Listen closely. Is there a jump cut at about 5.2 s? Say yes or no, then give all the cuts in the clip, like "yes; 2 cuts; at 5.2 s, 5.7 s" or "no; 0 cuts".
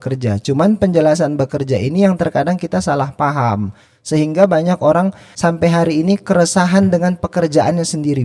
yes; 1 cut; at 5.2 s